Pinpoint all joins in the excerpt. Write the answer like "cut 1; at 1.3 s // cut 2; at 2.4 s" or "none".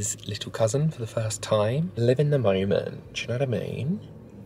cut 1; at 1.9 s